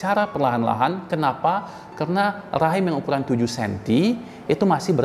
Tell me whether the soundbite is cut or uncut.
uncut